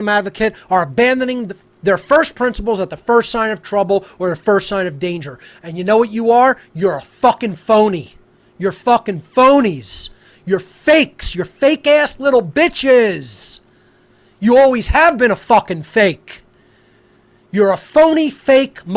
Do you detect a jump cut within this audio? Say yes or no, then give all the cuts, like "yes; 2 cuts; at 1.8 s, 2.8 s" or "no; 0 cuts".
no; 0 cuts